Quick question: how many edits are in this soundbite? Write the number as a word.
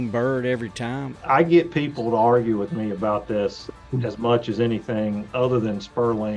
one